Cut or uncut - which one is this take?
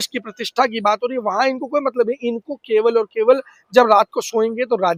uncut